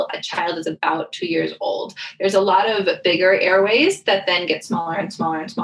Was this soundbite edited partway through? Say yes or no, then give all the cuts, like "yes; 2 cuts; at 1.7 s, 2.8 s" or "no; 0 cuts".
no; 0 cuts